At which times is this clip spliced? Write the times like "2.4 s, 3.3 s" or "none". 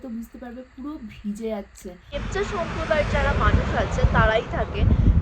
2.2 s